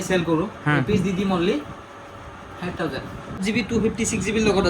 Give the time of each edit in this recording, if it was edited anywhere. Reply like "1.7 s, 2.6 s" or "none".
3.4 s